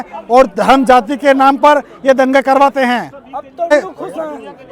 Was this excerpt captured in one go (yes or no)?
no